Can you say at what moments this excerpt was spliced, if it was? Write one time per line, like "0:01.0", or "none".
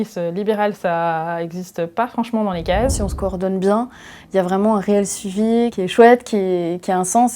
0:03.0
0:05.7